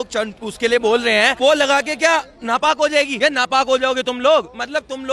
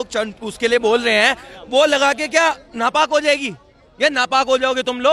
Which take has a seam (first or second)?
first